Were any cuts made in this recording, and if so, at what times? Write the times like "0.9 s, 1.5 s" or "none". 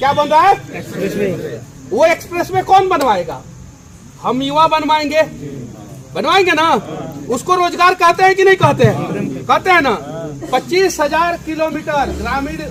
none